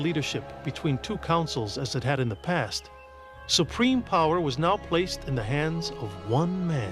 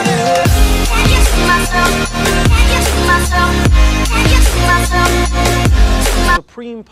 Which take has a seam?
first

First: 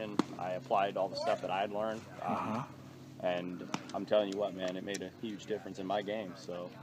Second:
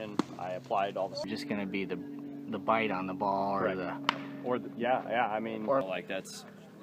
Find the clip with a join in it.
second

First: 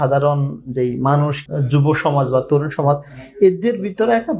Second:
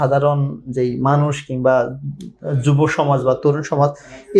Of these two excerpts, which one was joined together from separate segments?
first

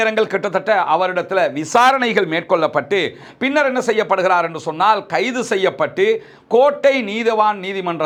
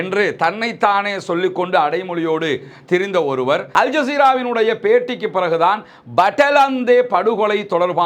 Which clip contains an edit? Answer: second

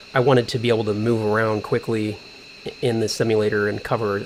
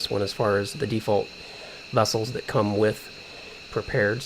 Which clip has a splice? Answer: second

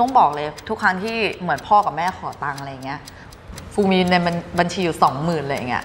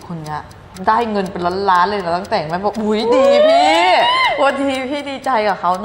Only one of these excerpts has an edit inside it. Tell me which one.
first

